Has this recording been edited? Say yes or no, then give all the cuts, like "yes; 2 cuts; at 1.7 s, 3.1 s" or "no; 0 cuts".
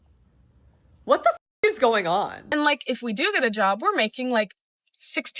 yes; 1 cut; at 2.4 s